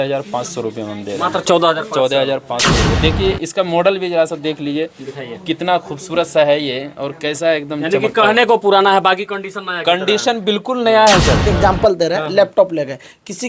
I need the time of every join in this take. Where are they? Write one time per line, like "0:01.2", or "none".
0:02.8
0:11.5